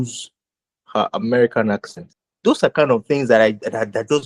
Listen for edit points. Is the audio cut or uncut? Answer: cut